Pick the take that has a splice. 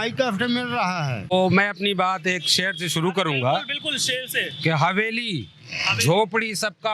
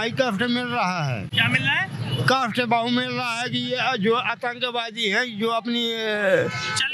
first; 1 cut; at 1.3 s

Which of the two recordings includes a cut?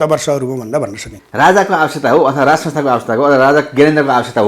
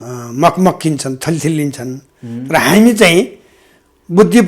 first; 1 cut; at 1.1 s

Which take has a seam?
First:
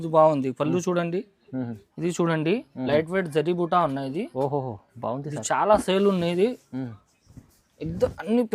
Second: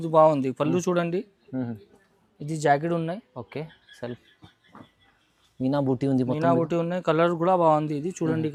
first; 1 cut; at 1.8 s

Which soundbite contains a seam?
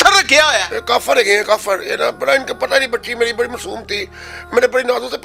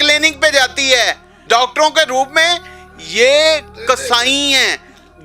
second; 1 cut; at 1.4 s

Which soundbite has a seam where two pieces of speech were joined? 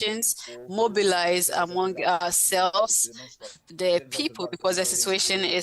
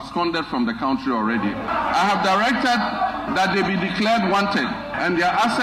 first; 1 cut; at 3.4 s

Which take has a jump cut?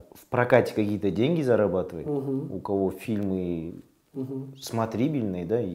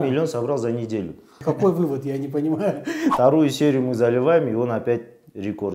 second; 2 cuts; at 1.4 s, 3.1 s

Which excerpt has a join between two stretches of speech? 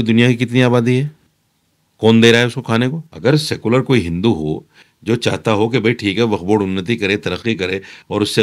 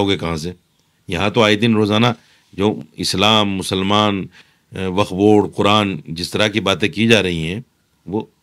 first; 1 cut; at 3.1 s

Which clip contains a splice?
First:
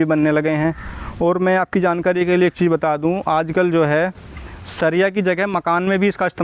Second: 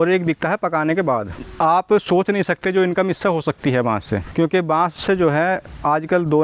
second; 2 cuts; at 1.4 s, 4.3 s

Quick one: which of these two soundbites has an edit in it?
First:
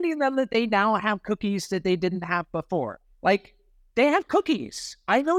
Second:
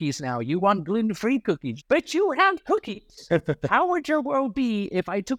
first; 1 cut; at 3.0 s

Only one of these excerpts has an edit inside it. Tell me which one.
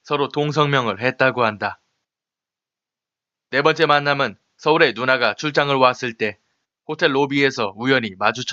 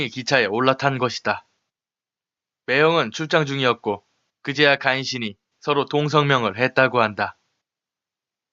second; 1 cut; at 1.6 s

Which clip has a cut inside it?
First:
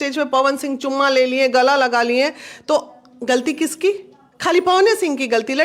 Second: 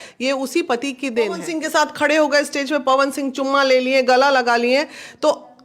second; 1 cut; at 1.5 s

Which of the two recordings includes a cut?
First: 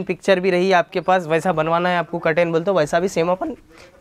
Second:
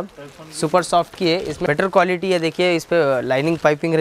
second; 1 cut; at 1.6 s

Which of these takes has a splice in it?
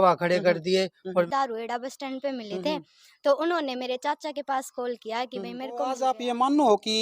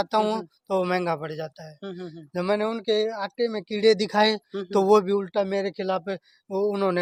first; 2 cuts; at 1.0 s, 5.9 s

